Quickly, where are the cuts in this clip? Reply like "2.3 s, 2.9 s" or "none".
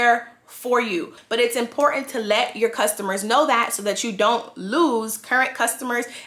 1.2 s